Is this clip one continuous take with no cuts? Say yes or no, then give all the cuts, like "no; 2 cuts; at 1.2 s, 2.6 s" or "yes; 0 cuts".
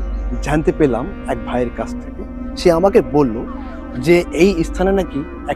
yes; 0 cuts